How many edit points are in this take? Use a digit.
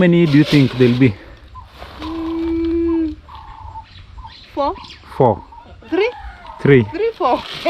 0